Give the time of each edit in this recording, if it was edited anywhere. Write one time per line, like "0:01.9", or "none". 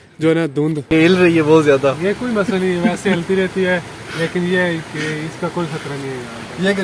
0:00.9